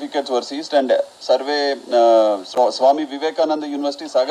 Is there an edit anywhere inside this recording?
no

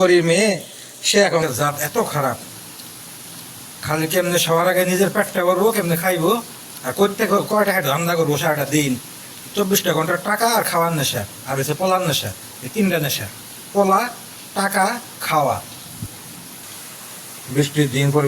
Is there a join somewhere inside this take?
yes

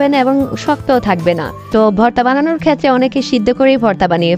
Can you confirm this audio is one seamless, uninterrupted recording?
no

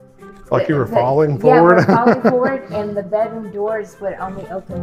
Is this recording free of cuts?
yes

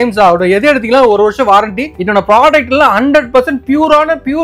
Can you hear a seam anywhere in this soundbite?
yes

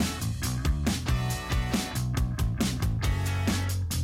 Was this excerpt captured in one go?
no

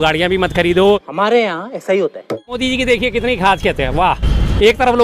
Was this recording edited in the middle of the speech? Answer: yes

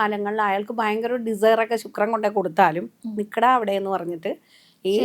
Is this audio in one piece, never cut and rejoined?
yes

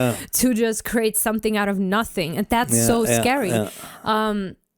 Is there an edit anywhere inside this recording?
no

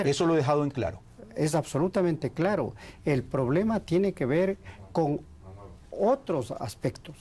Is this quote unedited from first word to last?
no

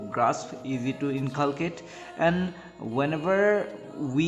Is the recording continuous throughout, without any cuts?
yes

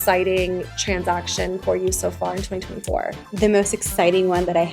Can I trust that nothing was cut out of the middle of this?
no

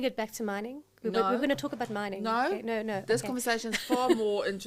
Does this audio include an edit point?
no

